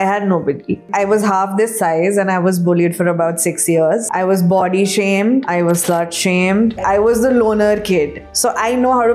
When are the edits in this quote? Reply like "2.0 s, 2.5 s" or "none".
4.1 s, 5.5 s, 6.8 s, 8.3 s

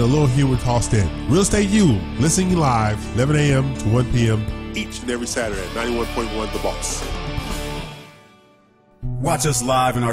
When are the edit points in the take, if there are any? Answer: 8.7 s

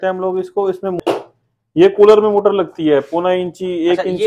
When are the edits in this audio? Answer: 1.0 s

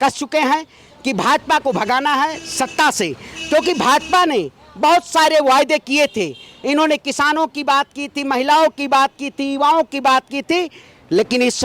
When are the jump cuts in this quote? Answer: none

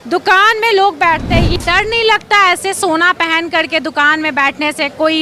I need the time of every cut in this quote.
1.5 s

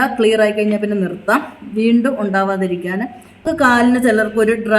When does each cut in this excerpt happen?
3.4 s

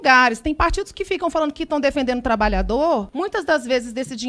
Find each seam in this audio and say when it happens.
3.1 s

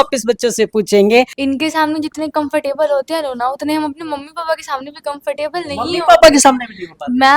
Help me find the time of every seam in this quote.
1.3 s

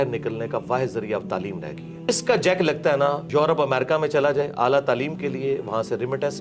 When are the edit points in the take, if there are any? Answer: 2.1 s, 3.2 s

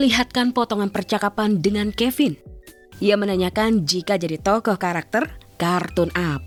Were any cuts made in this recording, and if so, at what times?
none

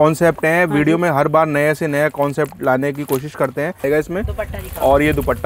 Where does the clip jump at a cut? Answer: 3.8 s

